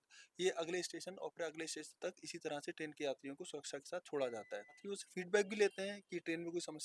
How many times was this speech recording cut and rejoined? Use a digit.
1